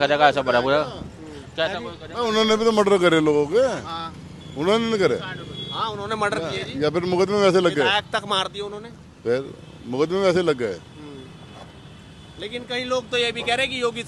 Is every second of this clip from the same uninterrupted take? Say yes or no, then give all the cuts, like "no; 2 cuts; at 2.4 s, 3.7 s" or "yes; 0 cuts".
yes; 0 cuts